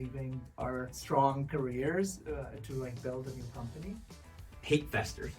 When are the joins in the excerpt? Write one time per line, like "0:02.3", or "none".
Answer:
0:01.0
0:04.3

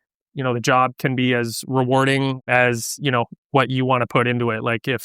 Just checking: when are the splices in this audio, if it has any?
0:02.4

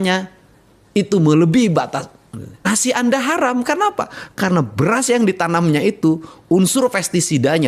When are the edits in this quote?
0:02.7

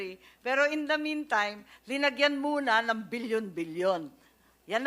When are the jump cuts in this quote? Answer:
0:03.3

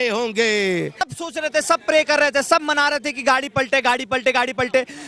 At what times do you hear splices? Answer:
0:01.1

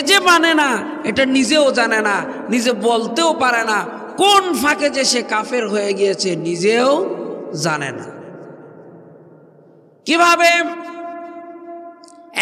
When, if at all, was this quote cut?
none

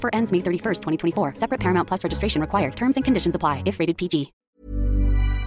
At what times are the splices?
0:04.4

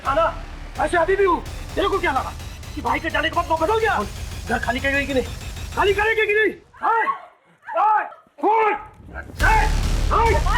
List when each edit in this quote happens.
0:04.0

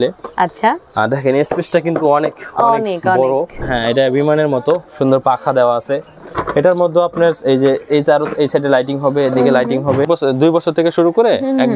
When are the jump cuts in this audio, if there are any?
0:03.7
0:10.1

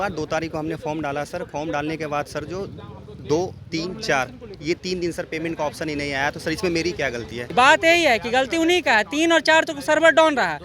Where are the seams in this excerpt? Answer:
0:07.4

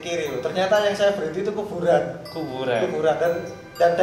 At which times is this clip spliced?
none

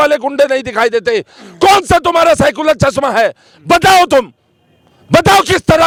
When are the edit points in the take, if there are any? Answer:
none

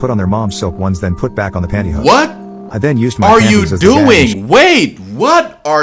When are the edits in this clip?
none

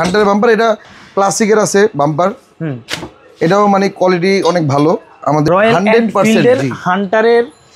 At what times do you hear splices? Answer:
0:00.9
0:05.5

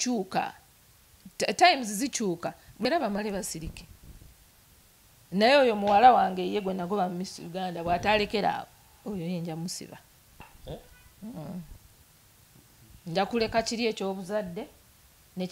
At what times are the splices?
0:02.8

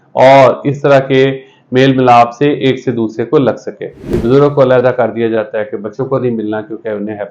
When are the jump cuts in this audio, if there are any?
0:04.1

